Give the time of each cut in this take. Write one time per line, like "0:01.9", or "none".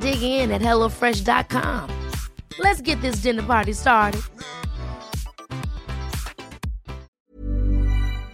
0:07.1